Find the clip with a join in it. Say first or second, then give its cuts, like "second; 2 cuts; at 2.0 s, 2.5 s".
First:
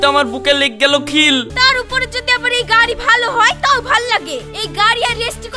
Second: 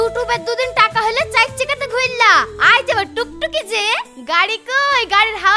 first; 1 cut; at 1.5 s